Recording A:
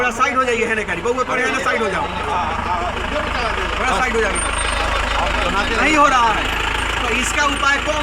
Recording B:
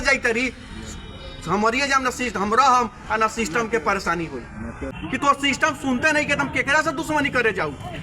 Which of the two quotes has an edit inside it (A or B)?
B